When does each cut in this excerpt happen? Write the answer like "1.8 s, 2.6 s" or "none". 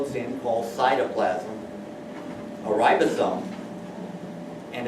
2.8 s